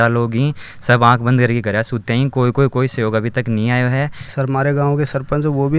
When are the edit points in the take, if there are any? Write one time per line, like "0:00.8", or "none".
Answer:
0:04.2